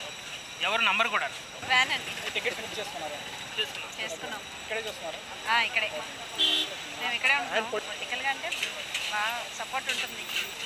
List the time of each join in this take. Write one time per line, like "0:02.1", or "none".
none